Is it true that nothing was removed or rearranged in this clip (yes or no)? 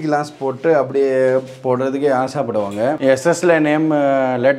no